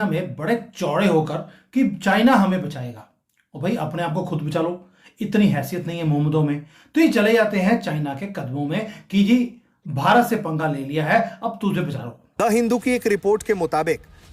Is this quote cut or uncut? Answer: cut